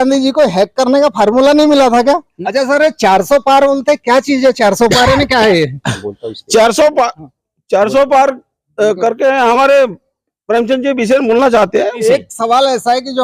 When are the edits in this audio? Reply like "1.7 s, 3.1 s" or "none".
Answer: 2.3 s, 12.0 s